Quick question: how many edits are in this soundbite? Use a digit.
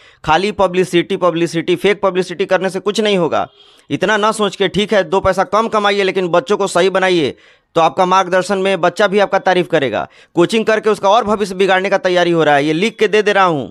0